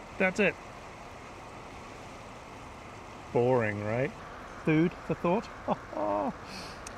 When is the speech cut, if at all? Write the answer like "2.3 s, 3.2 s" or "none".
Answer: 4.2 s

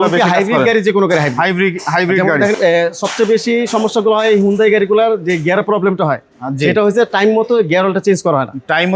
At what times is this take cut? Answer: 2.6 s

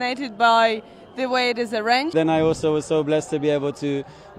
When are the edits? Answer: 2.1 s

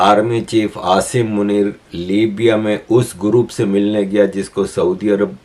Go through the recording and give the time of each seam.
none

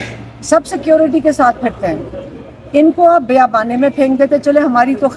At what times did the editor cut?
none

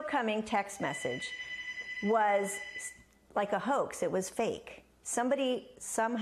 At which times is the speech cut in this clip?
3.5 s

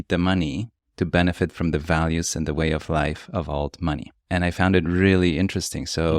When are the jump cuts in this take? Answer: 4.1 s

